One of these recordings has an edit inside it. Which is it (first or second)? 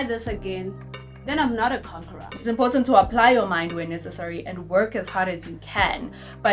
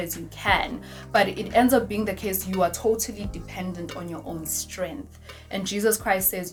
first